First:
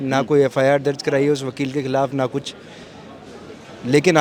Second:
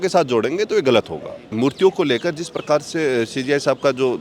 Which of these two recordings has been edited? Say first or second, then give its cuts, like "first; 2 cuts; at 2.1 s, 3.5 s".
second; 1 cut; at 1.5 s